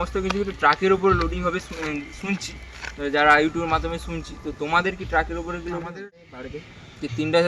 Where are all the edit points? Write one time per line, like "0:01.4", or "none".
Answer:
0:06.3